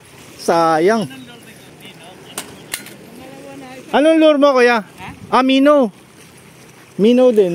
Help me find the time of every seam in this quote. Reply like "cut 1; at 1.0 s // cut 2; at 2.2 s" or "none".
cut 1; at 1.7 s